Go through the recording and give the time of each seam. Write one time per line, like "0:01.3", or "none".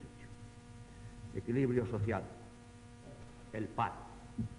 0:03.4